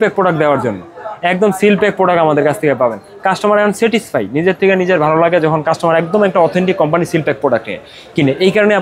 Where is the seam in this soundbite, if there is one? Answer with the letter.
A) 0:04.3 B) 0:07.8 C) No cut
C